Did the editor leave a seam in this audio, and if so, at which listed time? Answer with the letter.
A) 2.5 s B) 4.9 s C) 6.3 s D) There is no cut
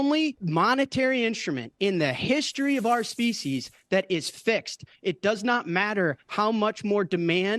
D